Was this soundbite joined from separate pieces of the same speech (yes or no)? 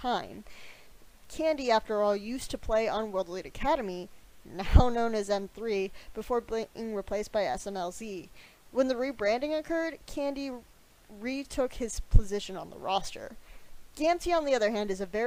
no